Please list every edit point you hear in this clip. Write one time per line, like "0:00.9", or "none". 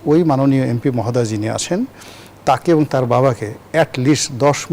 none